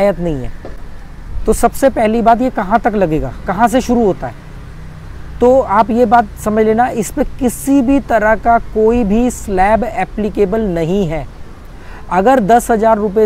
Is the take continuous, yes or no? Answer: yes